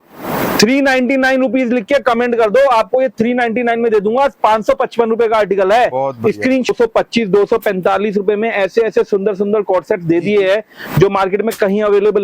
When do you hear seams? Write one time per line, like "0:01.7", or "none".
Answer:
0:06.7

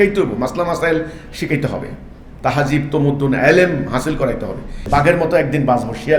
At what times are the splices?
0:04.8

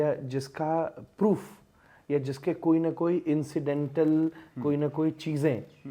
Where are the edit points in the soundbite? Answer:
none

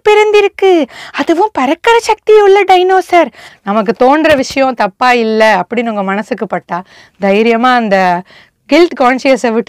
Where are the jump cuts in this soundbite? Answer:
0:03.5

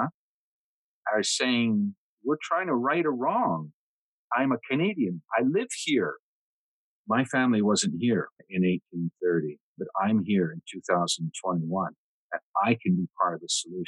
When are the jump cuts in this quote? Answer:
0:02.1
0:04.1
0:06.7
0:08.4
0:09.8

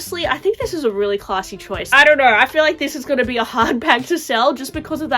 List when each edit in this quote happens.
0:01.9

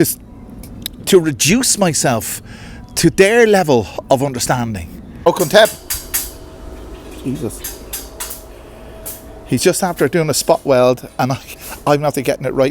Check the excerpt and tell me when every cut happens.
0:05.3

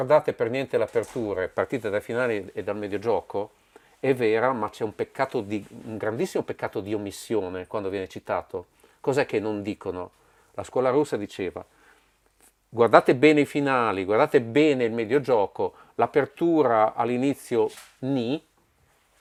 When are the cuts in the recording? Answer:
none

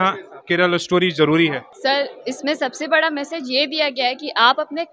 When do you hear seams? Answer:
0:01.7

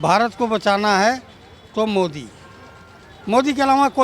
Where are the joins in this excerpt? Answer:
none

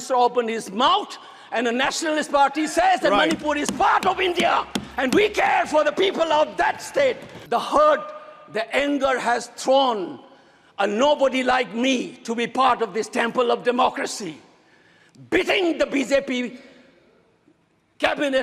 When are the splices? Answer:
0:07.3

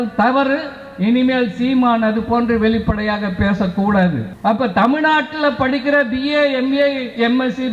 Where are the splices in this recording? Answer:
0:04.3

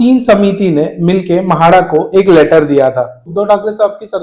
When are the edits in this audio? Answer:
0:03.3

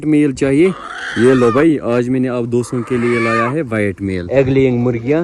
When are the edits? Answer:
0:04.2

